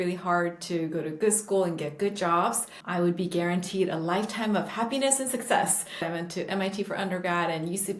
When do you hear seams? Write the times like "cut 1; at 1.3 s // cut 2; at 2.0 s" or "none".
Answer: cut 1; at 2.7 s // cut 2; at 6.1 s